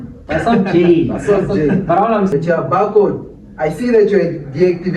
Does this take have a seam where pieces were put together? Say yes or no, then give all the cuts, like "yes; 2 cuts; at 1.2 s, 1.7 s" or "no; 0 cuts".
yes; 1 cut; at 2.3 s